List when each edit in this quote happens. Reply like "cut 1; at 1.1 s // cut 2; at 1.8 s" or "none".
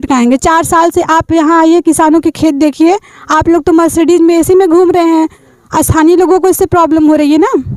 none